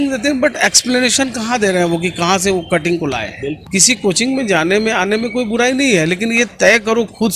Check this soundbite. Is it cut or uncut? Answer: cut